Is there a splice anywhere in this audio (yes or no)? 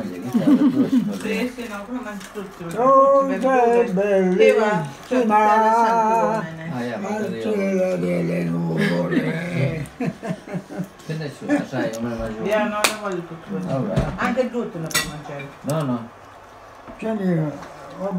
no